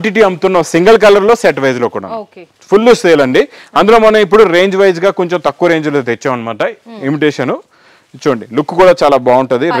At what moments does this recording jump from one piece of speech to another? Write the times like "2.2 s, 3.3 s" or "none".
none